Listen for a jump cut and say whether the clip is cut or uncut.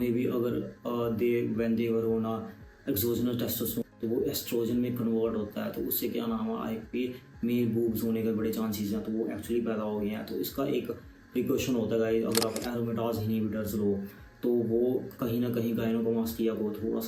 uncut